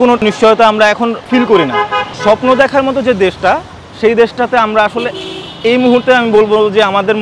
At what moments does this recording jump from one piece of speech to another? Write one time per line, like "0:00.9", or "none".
none